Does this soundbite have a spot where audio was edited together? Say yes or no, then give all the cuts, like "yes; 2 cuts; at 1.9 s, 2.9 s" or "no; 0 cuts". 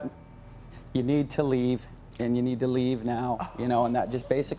no; 0 cuts